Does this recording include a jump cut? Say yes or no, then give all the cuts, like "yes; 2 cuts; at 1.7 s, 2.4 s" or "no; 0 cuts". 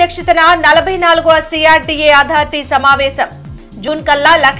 no; 0 cuts